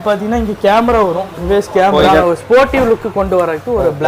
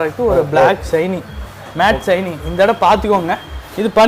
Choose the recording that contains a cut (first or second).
first